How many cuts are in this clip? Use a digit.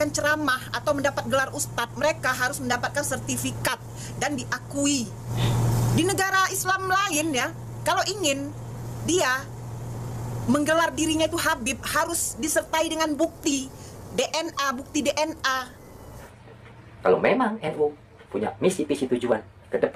2